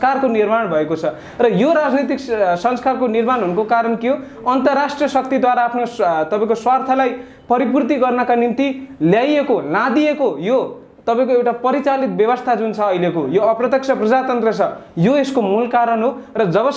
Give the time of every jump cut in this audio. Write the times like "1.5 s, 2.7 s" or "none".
none